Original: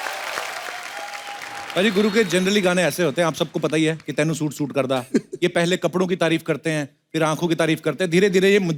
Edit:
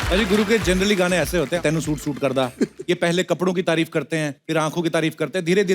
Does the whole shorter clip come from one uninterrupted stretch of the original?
no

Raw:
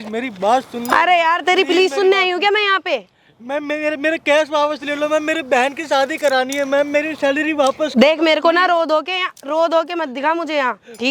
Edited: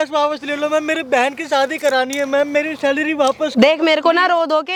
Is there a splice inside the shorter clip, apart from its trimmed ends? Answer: no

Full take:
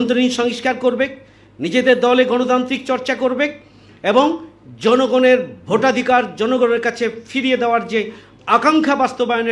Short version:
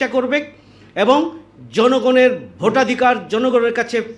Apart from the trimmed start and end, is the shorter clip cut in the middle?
no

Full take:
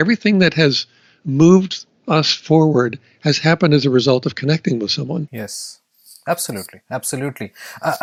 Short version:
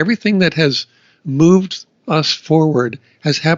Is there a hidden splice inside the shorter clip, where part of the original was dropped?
no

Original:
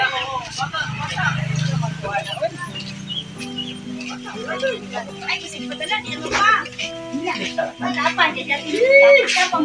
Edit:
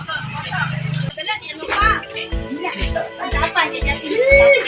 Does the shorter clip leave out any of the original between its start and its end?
yes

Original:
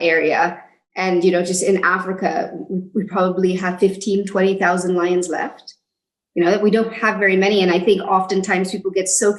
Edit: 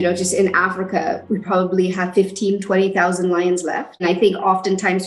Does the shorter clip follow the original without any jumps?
no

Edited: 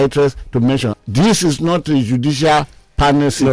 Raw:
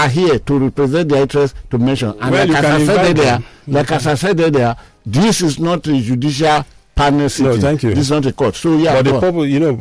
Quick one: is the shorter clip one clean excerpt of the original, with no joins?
no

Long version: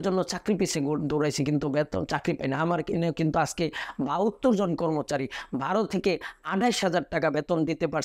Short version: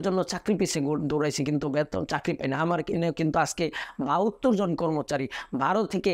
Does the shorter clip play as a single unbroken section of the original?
yes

